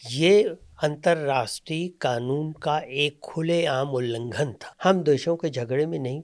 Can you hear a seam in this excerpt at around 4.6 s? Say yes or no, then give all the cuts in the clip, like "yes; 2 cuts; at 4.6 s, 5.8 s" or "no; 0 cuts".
yes; 1 cut; at 4.6 s